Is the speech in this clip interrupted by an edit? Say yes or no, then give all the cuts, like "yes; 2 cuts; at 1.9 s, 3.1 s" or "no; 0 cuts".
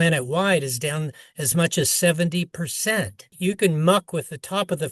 yes; 1 cut; at 3.2 s